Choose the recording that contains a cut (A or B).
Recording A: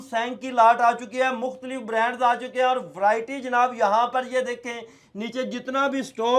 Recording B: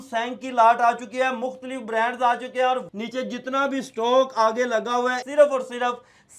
B